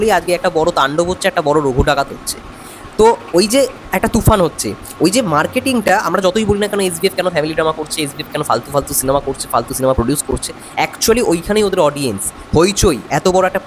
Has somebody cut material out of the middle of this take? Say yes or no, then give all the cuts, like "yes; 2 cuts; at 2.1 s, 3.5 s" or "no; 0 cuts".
no; 0 cuts